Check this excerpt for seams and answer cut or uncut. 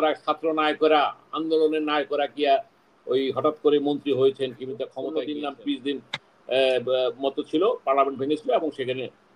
cut